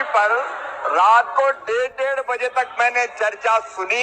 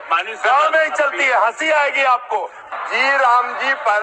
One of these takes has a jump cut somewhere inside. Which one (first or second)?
second